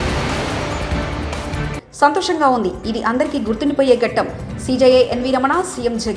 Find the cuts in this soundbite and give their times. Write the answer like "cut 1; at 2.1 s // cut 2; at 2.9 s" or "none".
none